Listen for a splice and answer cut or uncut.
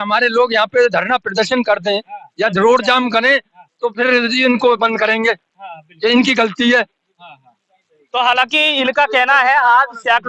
uncut